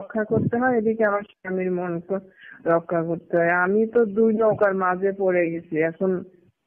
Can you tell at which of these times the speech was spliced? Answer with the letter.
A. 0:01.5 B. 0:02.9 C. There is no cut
C